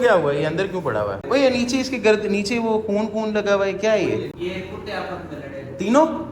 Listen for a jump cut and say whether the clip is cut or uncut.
cut